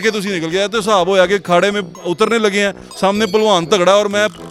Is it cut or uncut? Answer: uncut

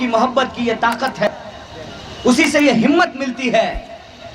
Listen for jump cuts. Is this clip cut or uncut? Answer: cut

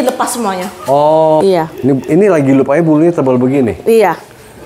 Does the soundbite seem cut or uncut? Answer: cut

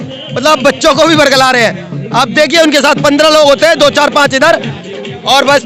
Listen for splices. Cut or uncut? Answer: uncut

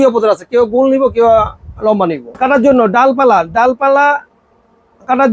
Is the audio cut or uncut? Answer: cut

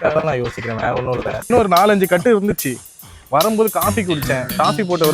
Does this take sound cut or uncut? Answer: cut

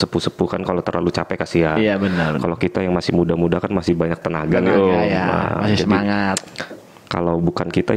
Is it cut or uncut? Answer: uncut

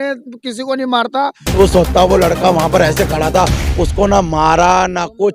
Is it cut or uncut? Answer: cut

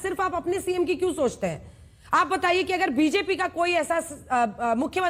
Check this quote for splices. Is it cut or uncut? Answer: uncut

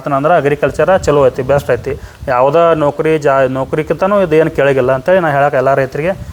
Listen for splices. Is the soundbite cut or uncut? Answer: uncut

